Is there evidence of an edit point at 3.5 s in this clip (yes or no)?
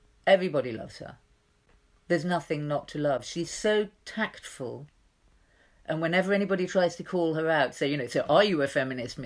no